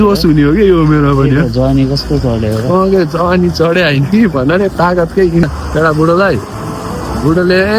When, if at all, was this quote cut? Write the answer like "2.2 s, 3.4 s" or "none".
5.4 s